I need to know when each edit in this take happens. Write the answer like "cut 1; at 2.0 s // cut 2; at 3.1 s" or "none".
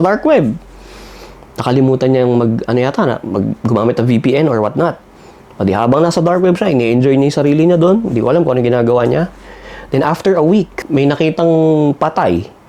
none